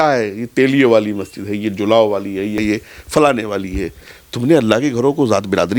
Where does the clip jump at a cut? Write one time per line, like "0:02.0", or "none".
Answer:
0:02.6